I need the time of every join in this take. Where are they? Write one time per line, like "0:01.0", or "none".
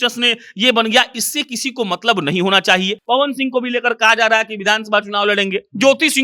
0:03.0